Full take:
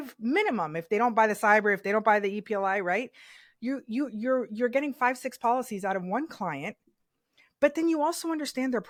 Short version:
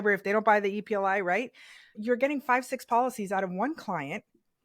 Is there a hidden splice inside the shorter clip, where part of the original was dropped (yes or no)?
yes